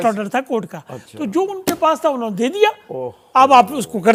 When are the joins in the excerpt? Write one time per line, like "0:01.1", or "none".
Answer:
none